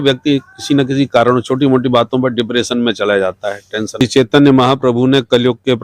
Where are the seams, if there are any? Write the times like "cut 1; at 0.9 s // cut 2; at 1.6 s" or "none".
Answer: cut 1; at 4.0 s